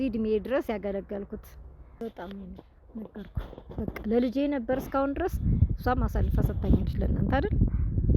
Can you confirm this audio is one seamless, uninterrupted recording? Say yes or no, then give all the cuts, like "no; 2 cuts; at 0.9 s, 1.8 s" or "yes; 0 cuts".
no; 1 cut; at 2.0 s